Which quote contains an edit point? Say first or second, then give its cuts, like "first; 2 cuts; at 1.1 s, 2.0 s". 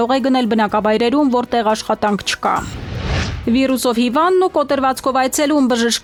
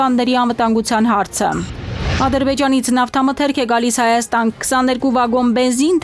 second; 1 cut; at 2.0 s